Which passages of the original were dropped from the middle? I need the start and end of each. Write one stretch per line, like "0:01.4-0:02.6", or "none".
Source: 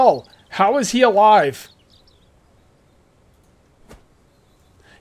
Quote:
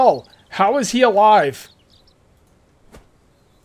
0:02.1-0:03.1